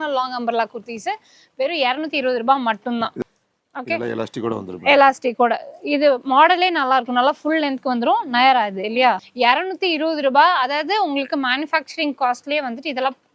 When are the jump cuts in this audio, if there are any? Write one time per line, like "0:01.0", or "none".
0:03.2
0:09.3